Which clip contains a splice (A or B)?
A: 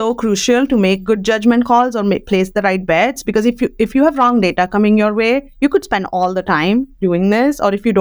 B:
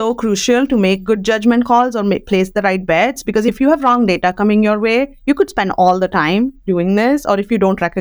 B